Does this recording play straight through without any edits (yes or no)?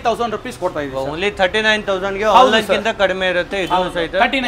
yes